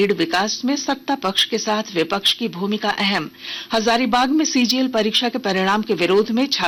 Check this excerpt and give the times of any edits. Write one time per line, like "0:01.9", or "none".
none

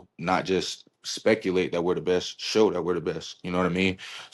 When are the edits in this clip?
none

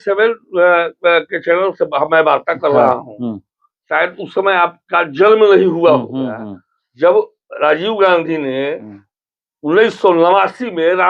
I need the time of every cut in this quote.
none

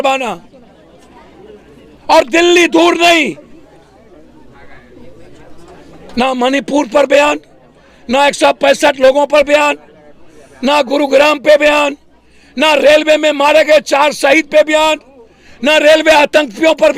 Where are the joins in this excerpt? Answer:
none

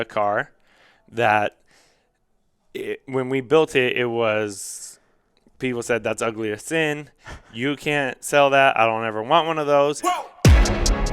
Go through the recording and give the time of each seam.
0:10.0

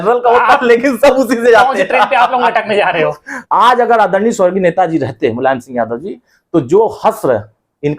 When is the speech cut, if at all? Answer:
0:03.3

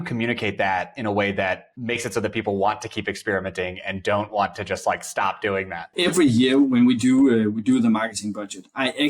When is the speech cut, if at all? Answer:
0:01.7
0:05.9

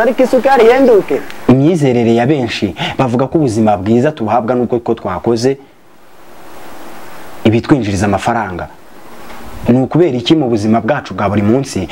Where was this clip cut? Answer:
0:01.2

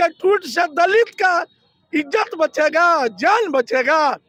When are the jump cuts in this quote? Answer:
none

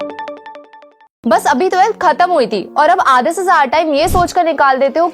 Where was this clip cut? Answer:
0:01.0

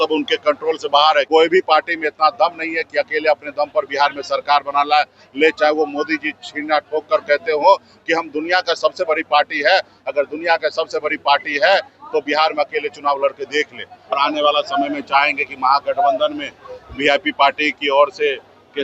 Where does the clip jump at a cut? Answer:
0:01.3
0:14.1

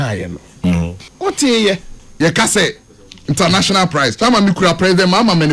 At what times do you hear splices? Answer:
0:01.0
0:02.0

